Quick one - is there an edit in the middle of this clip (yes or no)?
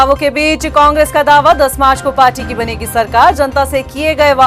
no